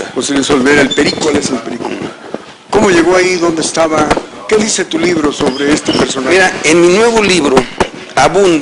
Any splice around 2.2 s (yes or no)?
no